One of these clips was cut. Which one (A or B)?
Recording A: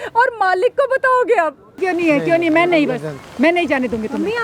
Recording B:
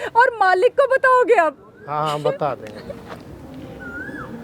A